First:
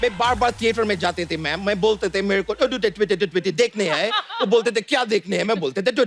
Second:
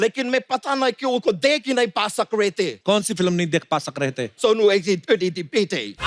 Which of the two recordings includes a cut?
second; 2 cuts; at 2.8 s, 4.3 s

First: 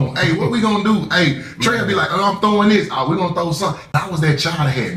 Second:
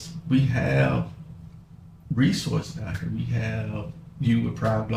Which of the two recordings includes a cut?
first; 1 cut; at 3.8 s

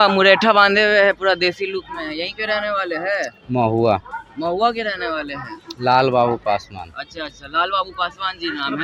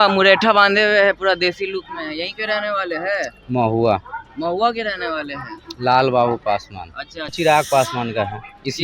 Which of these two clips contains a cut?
second; 1 cut; at 7.4 s

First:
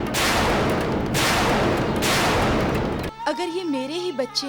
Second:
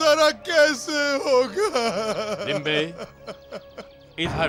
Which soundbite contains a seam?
first; 1 cut; at 3.1 s

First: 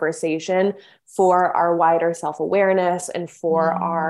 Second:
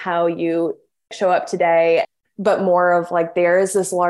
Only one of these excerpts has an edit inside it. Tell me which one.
second; 2 cuts; at 1.1 s, 2.1 s

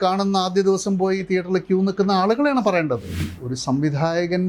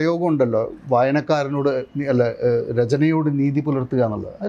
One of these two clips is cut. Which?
first; 1 cut; at 3.2 s

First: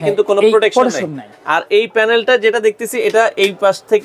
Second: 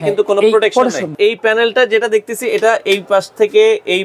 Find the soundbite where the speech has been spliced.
second; 1 cut; at 1.1 s

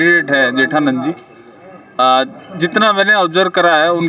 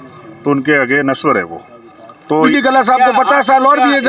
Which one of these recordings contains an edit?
second; 1 cut; at 2.5 s

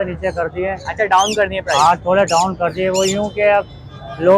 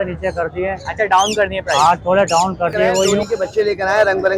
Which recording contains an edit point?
second; 1 cut; at 3.2 s

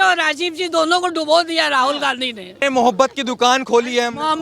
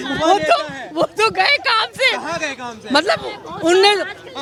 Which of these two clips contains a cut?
first; 1 cut; at 2.6 s

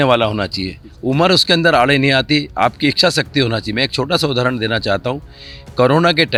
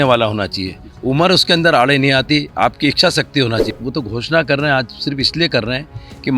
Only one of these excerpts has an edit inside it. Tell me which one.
second; 1 cut; at 3.7 s

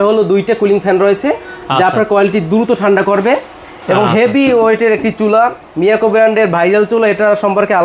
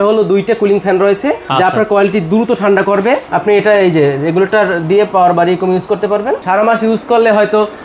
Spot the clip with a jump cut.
second; 3 cuts; at 1.4 s, 3.3 s, 6.4 s

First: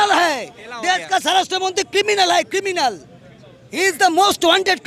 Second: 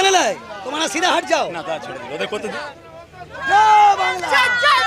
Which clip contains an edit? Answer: second; 1 cut; at 2.6 s

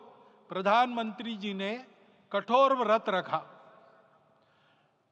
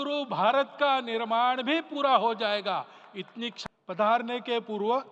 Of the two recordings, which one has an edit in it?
second; 1 cut; at 3.6 s

